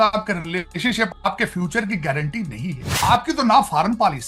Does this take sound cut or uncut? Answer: cut